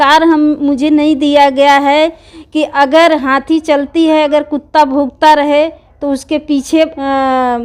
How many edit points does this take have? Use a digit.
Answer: 0